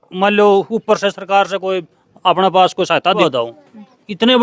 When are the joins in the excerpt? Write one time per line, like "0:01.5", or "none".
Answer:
0:03.1